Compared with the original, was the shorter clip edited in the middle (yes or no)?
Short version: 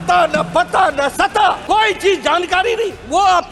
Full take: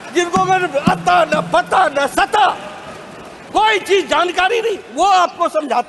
yes